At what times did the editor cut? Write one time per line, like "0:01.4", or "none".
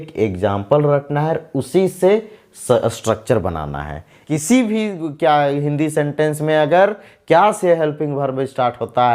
0:04.2